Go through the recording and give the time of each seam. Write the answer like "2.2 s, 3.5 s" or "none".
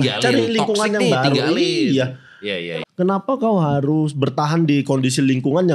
2.6 s